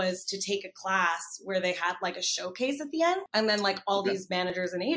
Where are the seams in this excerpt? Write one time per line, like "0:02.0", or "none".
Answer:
0:03.3